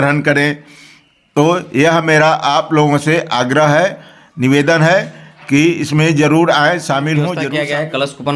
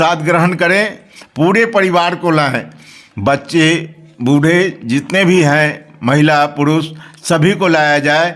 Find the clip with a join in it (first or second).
first